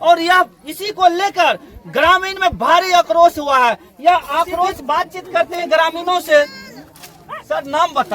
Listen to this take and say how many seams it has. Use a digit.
1